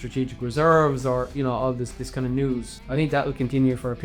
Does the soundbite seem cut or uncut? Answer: cut